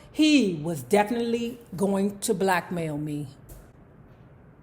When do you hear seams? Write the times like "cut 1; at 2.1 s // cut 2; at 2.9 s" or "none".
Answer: cut 1; at 3.5 s